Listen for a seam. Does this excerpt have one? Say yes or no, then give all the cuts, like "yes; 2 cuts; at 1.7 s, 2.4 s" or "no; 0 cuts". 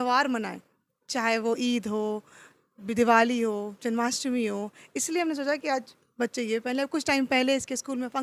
no; 0 cuts